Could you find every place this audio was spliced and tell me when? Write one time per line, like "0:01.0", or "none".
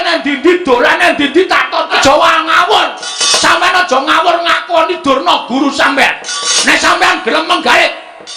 0:01.9